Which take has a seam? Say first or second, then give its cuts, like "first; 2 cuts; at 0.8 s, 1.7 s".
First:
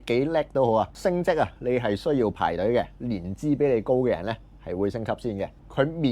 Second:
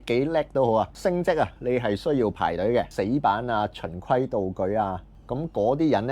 second; 1 cut; at 2.9 s